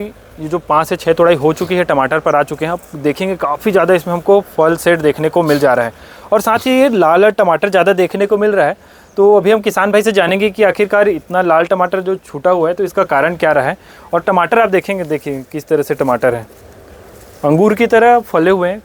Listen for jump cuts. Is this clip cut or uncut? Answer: uncut